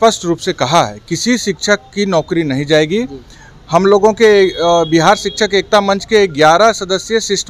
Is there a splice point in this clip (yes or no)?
no